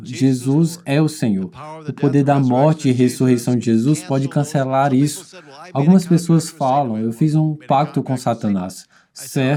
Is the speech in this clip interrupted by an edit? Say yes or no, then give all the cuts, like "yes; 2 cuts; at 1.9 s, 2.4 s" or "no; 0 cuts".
no; 0 cuts